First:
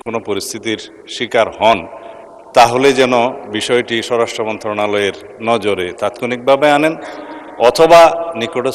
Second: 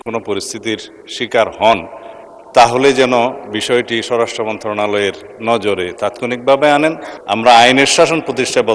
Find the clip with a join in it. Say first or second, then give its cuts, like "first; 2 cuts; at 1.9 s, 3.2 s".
second; 1 cut; at 7.1 s